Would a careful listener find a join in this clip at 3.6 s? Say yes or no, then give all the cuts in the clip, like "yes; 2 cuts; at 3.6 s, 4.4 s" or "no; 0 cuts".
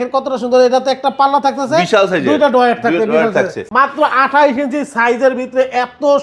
yes; 1 cut; at 3.6 s